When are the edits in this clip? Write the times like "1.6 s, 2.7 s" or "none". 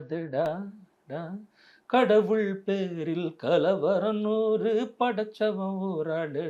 none